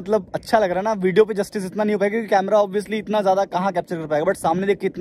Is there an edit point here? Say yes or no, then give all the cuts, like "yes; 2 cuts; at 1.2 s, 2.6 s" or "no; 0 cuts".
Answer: no; 0 cuts